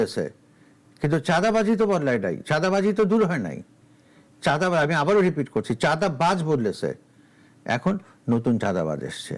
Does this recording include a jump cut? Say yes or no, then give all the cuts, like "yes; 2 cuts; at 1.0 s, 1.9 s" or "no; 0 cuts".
no; 0 cuts